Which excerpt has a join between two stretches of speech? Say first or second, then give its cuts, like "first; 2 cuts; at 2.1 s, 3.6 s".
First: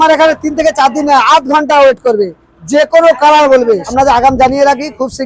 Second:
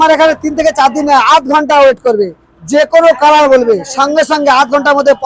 first; 1 cut; at 3.9 s